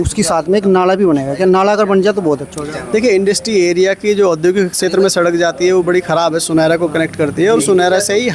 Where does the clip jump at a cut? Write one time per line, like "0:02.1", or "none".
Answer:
none